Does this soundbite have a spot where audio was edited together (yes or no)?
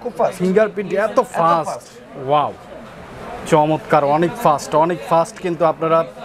no